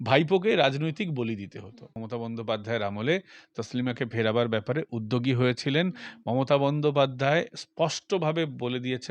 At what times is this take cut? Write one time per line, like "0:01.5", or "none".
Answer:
0:02.1